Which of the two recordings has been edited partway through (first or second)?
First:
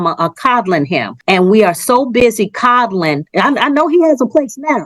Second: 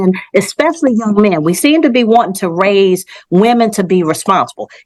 first